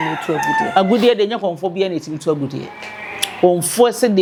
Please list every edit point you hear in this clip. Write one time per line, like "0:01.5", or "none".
none